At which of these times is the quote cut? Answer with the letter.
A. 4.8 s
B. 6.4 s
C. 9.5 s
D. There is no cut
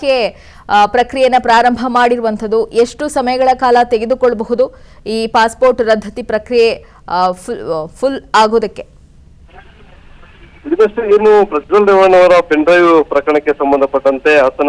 C